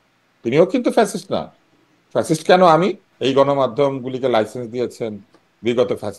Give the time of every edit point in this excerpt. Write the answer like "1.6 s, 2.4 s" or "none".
3.1 s